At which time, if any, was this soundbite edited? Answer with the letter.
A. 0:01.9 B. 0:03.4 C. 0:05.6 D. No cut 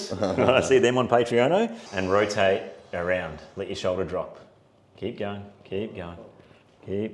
A